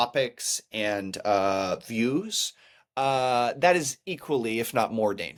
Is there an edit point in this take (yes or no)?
no